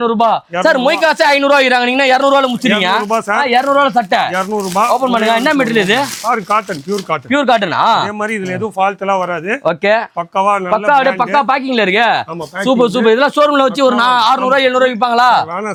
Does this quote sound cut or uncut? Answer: uncut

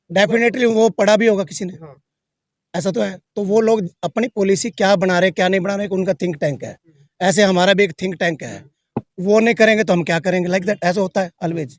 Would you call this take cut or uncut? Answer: uncut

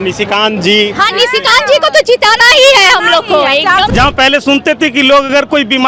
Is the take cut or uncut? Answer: cut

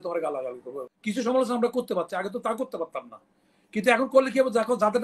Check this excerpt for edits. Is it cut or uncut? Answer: cut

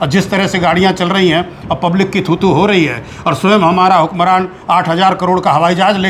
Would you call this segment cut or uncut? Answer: uncut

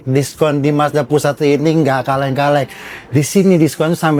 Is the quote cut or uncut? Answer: uncut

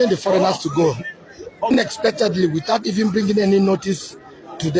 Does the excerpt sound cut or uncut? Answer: cut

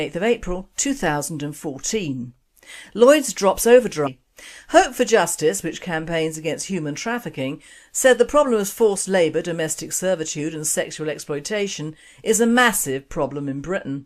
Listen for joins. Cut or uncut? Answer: uncut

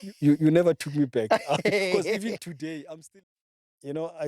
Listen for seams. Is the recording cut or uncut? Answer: cut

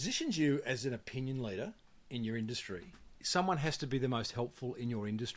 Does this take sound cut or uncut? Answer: cut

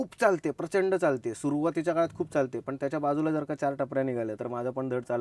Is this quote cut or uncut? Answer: uncut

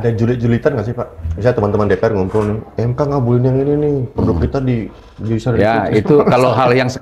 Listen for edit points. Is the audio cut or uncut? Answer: uncut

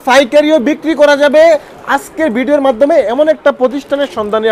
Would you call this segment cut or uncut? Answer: uncut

